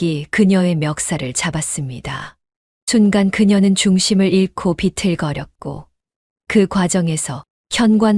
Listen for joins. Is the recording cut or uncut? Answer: uncut